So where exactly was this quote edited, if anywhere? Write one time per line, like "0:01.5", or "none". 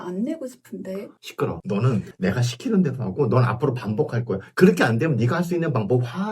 0:02.1